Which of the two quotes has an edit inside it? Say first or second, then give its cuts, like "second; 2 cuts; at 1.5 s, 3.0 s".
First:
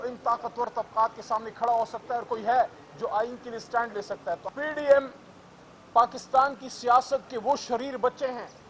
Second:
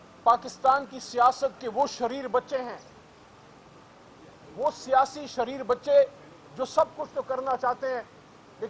first; 1 cut; at 4.4 s